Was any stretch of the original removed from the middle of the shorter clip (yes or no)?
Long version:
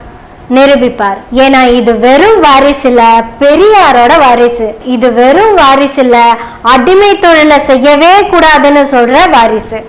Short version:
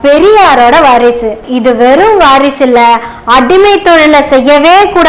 no